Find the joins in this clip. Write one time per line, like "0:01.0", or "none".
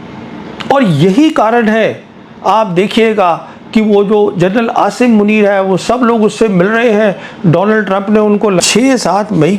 0:08.6